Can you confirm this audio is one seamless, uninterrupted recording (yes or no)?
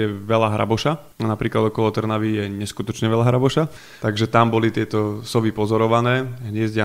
no